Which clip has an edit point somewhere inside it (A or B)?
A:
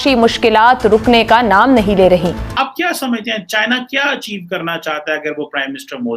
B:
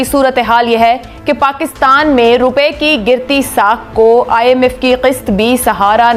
A